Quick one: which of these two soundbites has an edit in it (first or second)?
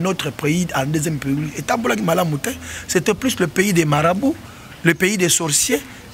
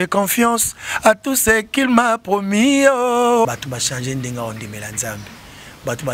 second